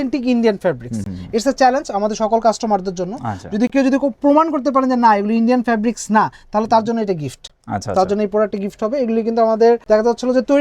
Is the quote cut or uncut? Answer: uncut